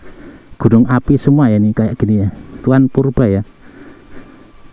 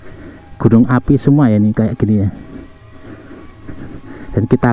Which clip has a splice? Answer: first; 1 cut; at 2.6 s

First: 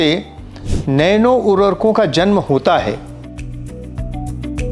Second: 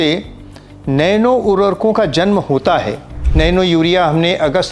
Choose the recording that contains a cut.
second; 1 cut; at 3.2 s

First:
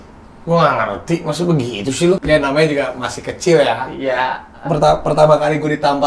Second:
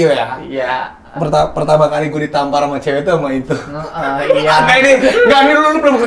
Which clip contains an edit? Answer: first; 1 cut; at 2.2 s

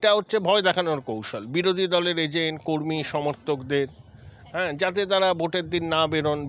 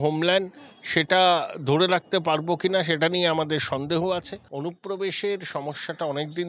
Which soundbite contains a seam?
second; 1 cut; at 4.4 s

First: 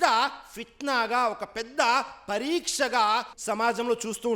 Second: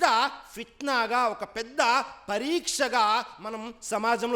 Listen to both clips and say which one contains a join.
first; 1 cut; at 3.3 s

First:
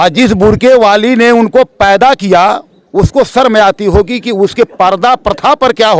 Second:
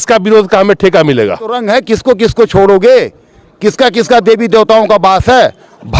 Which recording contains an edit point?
second; 1 cut; at 1.6 s

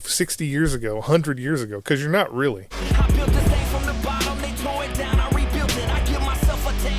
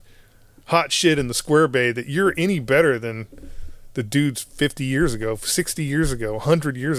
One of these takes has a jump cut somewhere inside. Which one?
first; 1 cut; at 3.1 s

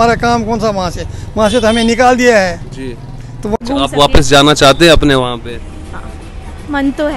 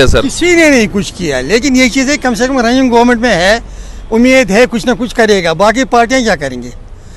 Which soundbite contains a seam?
first; 1 cut; at 3.6 s

